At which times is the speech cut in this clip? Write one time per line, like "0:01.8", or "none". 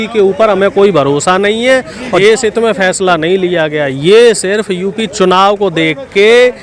0:02.2